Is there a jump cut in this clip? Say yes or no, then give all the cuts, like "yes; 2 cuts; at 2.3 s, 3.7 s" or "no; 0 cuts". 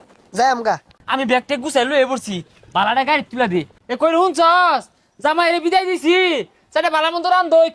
yes; 2 cuts; at 0.9 s, 3.7 s